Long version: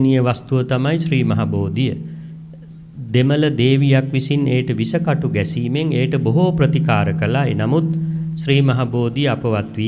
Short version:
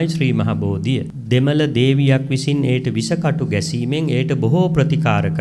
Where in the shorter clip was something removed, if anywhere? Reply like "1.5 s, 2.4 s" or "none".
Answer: 1.1 s